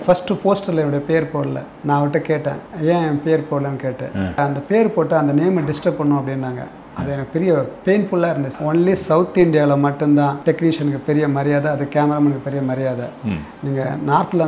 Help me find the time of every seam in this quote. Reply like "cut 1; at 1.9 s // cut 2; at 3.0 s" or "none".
cut 1; at 1.7 s // cut 2; at 2.7 s // cut 3; at 4.4 s // cut 4; at 8.6 s // cut 5; at 10.4 s